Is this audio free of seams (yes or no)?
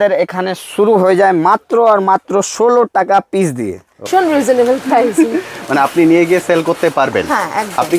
no